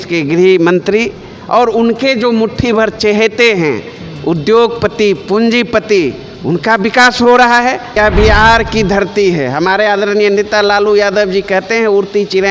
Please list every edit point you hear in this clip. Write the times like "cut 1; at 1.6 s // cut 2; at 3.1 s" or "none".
cut 1; at 8.0 s